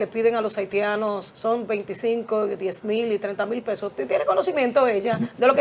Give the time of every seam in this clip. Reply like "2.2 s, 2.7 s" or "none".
1.3 s